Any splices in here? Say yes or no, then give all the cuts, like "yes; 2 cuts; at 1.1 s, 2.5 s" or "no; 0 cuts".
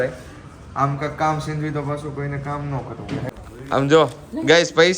yes; 1 cut; at 3.3 s